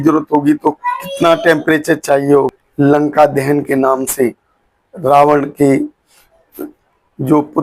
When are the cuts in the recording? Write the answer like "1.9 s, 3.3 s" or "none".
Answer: 2.6 s